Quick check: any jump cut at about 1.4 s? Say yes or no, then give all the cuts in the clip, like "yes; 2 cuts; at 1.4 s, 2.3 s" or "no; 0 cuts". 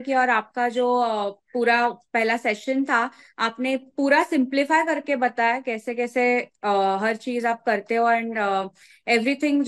no; 0 cuts